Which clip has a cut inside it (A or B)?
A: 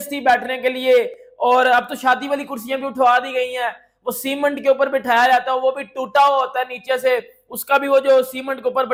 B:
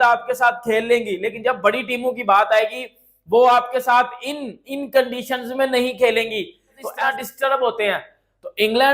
B